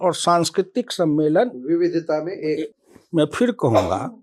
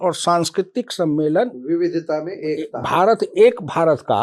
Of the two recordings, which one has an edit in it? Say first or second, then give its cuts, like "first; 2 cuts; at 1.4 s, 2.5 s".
first; 1 cut; at 2.7 s